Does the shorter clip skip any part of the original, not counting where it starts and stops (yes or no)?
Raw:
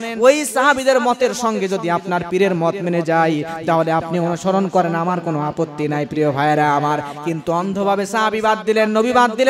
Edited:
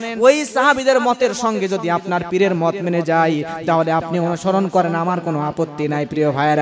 no